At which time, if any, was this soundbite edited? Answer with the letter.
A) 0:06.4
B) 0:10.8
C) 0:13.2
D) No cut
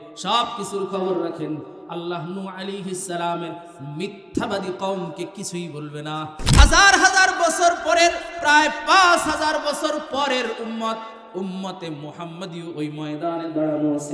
A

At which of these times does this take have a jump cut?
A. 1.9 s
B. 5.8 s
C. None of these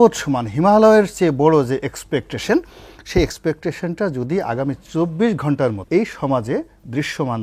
B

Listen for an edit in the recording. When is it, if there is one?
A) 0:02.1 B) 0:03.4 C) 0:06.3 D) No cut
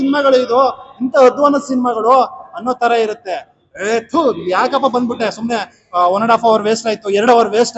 D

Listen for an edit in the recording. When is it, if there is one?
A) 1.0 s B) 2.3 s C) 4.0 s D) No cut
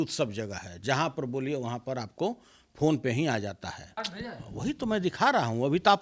C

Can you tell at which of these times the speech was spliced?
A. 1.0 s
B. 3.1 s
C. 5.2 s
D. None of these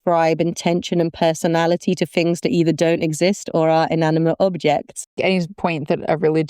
C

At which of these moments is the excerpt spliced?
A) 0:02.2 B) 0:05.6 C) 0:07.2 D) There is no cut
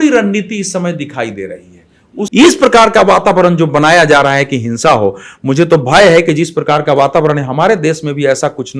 A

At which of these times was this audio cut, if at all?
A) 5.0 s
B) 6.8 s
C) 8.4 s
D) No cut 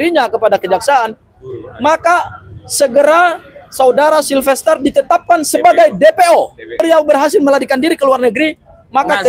B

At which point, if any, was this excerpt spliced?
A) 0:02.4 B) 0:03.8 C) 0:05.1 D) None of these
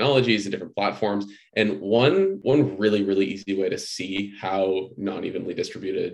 A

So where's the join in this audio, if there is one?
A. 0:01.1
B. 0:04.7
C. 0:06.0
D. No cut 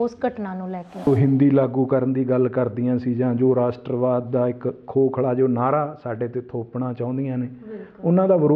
A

